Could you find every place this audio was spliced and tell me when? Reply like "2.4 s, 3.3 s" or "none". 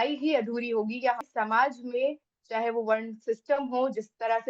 1.2 s